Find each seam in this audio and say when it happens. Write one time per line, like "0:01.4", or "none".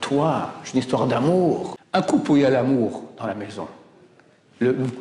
0:01.7